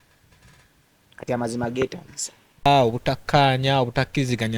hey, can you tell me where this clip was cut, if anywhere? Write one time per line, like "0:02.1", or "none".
0:02.6